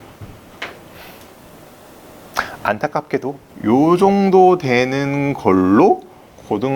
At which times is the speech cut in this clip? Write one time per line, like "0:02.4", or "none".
0:03.5